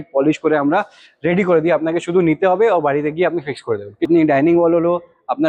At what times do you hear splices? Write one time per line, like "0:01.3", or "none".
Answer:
0:04.1